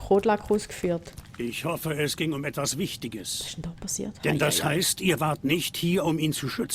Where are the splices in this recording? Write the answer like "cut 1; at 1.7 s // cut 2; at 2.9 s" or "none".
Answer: cut 1; at 1.2 s